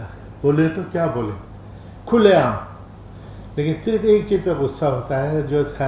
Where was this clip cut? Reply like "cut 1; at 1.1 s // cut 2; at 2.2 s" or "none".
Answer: none